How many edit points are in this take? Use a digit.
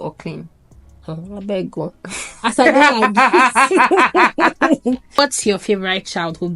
1